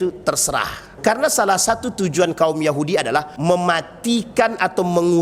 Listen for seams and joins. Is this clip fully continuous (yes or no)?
no